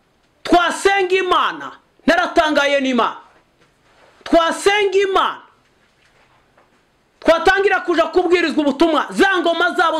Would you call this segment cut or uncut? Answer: uncut